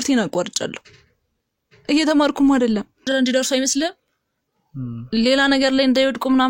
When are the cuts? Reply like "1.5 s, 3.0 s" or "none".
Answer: 3.1 s